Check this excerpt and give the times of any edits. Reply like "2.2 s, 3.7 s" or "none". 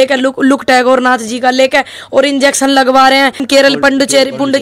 3.4 s